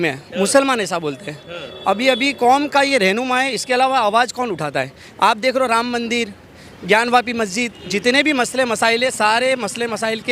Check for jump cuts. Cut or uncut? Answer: uncut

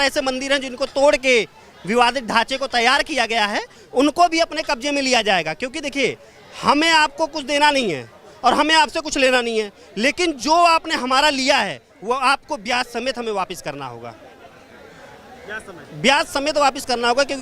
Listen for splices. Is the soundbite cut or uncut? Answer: uncut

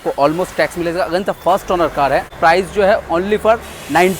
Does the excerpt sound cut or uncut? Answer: cut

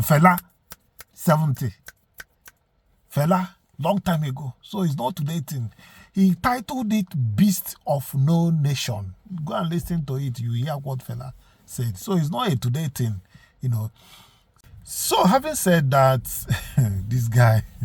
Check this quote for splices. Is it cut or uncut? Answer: uncut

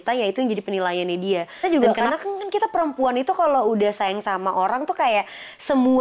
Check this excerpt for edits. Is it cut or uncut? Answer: cut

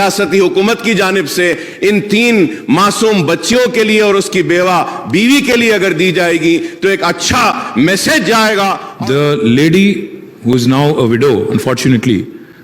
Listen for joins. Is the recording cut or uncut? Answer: cut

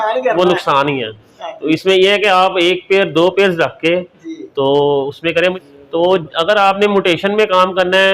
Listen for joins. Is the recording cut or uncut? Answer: cut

